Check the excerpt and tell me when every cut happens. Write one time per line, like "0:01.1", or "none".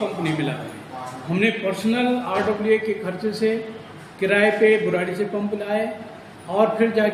none